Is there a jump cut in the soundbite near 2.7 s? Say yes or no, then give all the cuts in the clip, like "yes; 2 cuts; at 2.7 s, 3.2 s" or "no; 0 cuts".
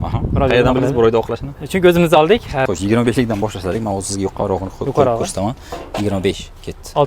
yes; 1 cut; at 2.7 s